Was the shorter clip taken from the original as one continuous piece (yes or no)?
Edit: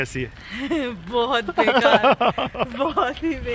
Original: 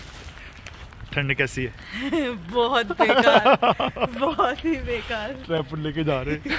yes